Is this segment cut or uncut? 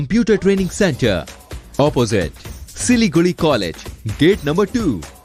uncut